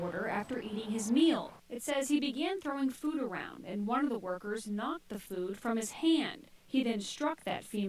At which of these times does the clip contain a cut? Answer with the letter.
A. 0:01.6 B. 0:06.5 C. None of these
B